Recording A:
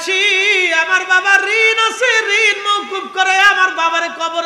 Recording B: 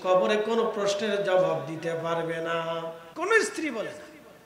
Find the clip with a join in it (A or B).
B